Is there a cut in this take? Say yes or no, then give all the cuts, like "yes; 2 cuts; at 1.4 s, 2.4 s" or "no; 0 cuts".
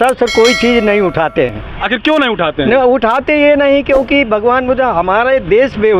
no; 0 cuts